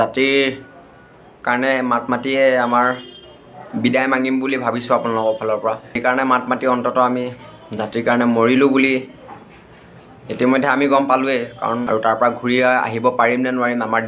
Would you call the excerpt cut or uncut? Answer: cut